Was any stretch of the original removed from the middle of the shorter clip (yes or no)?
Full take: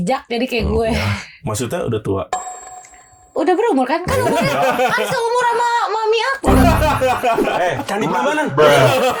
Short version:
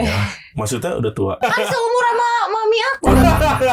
yes